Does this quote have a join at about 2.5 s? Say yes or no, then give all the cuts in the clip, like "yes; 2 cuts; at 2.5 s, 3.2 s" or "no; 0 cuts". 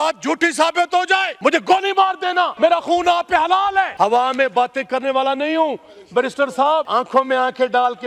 yes; 4 cuts; at 1.3 s, 2.5 s, 3.9 s, 6.9 s